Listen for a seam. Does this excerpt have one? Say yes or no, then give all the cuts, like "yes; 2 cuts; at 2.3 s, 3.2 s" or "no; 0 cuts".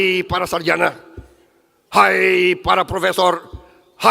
no; 0 cuts